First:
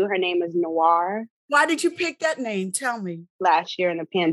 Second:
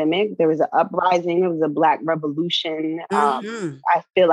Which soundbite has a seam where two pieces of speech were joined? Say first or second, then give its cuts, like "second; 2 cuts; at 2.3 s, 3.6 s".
first; 2 cuts; at 1.5 s, 3.3 s